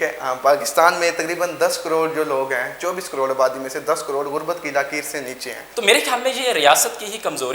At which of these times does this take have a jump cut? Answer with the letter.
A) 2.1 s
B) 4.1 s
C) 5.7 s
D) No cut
C